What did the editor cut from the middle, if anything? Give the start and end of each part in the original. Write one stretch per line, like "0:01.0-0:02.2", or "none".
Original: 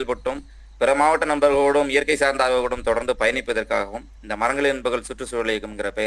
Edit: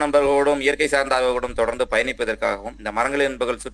0:04.0-0:04.2